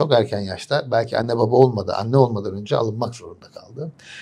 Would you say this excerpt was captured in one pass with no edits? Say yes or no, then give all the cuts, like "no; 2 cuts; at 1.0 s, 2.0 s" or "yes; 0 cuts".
yes; 0 cuts